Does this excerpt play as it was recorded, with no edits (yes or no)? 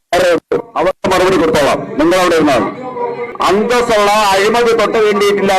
no